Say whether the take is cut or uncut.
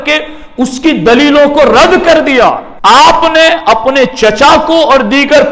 cut